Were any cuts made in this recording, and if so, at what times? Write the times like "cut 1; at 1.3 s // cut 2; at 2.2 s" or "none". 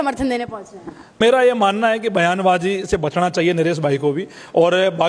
cut 1; at 1.1 s